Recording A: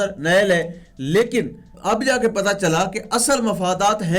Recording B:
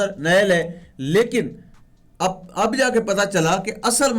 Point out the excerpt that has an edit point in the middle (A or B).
A